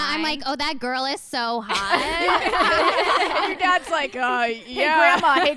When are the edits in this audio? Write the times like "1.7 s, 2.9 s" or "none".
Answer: none